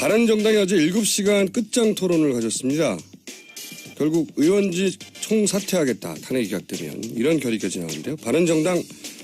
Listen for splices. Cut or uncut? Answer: uncut